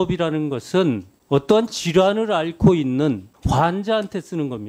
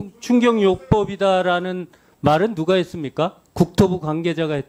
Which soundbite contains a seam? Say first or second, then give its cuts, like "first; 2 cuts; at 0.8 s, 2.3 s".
first; 2 cuts; at 1.1 s, 3.3 s